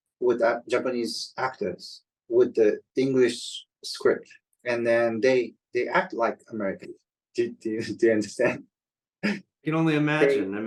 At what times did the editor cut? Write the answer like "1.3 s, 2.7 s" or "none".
none